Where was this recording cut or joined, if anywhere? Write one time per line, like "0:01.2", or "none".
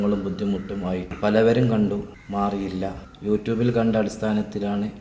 0:01.2
0:02.2
0:03.1